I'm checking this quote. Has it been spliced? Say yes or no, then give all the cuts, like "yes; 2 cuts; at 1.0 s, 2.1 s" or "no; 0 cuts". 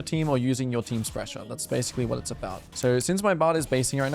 yes; 1 cut; at 2.7 s